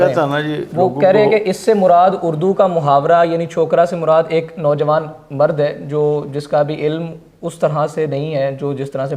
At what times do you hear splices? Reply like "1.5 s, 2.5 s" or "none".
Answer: none